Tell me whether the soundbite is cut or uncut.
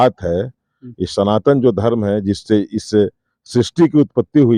uncut